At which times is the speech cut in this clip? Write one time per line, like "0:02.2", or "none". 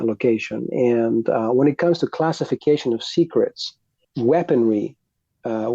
0:04.1